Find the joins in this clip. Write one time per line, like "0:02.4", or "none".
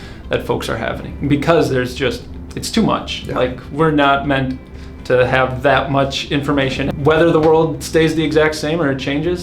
0:06.9